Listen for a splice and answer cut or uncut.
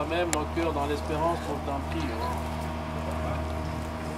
uncut